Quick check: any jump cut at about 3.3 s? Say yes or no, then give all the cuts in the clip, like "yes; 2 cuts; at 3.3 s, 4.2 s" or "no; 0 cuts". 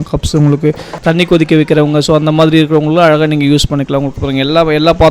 no; 1 cut; at 1.0 s